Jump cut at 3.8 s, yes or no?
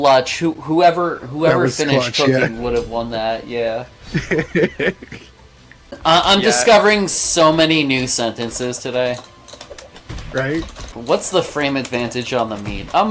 no